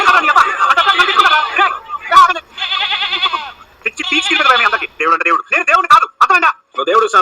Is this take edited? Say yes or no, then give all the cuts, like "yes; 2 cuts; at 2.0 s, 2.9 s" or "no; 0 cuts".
no; 0 cuts